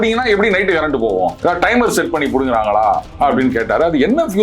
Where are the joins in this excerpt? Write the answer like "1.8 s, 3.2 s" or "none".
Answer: 1.4 s